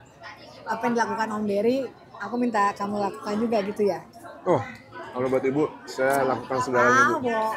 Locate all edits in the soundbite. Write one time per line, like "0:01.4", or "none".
none